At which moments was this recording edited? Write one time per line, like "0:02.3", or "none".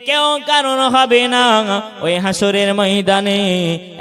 none